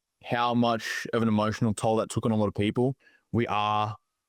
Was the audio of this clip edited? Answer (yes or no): yes